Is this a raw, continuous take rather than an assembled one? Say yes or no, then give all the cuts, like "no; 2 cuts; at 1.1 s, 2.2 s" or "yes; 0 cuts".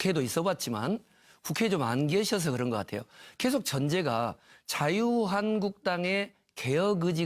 no; 1 cut; at 3.7 s